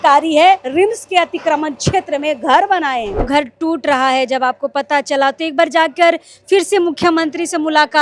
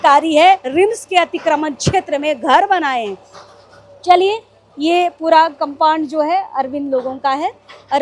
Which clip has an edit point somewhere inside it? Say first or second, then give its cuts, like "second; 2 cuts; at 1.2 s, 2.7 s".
first; 1 cut; at 3.3 s